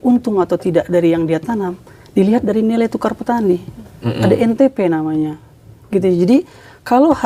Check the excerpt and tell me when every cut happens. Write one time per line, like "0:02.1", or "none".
none